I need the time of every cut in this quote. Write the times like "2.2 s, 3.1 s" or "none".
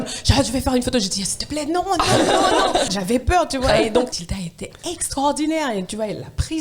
2.9 s, 4.3 s